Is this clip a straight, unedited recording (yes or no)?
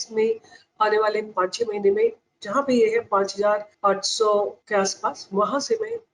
no